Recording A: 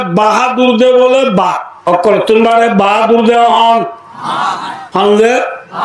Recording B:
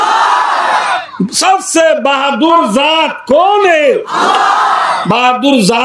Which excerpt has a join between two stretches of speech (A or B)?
A